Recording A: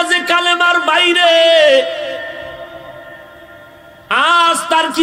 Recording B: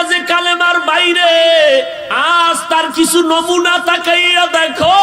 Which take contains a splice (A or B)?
B